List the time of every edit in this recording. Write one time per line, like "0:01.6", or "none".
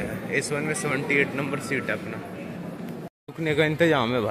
0:03.1

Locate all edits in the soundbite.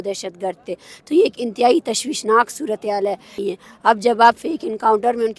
0:03.4

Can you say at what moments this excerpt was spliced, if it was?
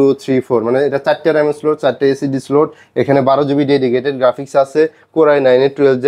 none

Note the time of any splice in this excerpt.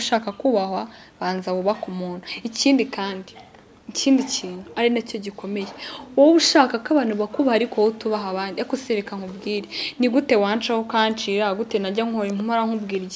none

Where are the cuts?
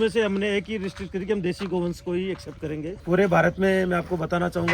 0:02.9

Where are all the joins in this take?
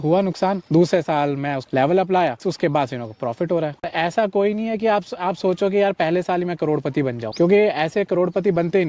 0:02.4
0:03.9

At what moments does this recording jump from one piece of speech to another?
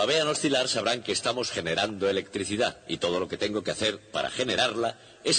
none

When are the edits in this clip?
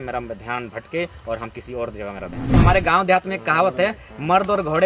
0:02.5

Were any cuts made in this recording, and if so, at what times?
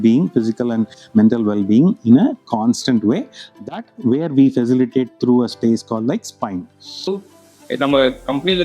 0:07.2

